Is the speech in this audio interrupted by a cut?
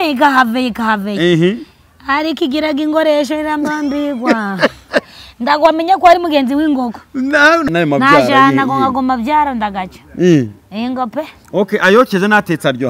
yes; 1 cut; at 7.7 s

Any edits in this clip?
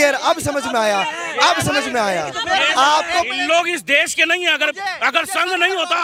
no; 0 cuts

